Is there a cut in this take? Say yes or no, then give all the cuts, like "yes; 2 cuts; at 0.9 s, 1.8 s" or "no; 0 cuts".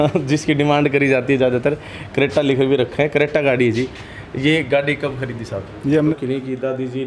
yes; 1 cut; at 6.1 s